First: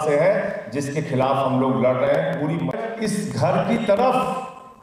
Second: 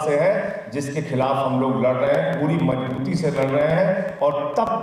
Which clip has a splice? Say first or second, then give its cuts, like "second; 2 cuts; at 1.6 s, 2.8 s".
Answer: first; 1 cut; at 2.8 s